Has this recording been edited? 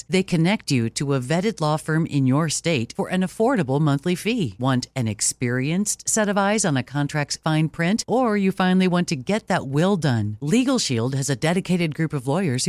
no; 0 cuts

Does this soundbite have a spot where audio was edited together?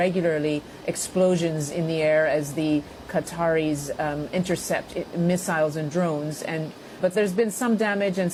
no; 0 cuts

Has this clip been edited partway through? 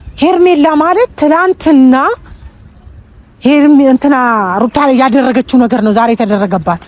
no; 0 cuts

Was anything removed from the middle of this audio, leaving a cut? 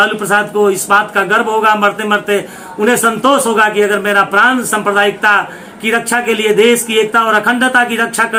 no; 0 cuts

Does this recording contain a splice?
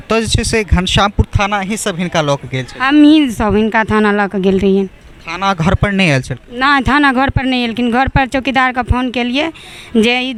no; 0 cuts

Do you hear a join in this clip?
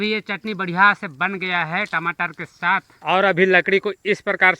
yes; 1 cut; at 2.9 s

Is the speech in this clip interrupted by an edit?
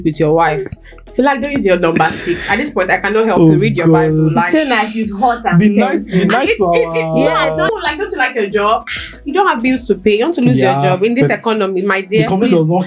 yes; 1 cut; at 7.7 s

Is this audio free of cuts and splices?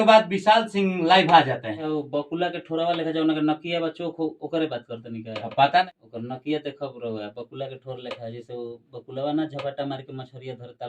no; 2 cuts; at 1.7 s, 5.8 s

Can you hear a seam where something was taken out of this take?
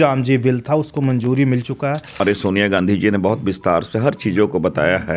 yes; 1 cut; at 2.2 s

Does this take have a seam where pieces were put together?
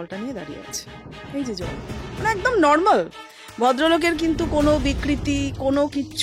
no; 0 cuts

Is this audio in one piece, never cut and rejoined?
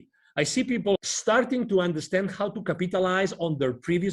no; 1 cut; at 1.0 s

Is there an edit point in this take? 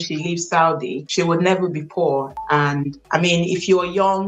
no; 0 cuts

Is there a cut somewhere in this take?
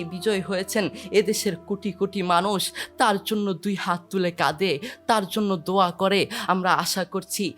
yes; 1 cut; at 6.4 s

